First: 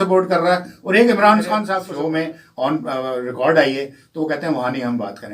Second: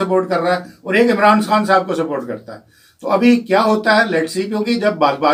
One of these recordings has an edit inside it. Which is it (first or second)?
first